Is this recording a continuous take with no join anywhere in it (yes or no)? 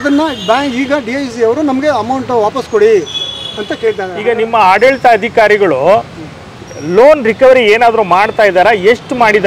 no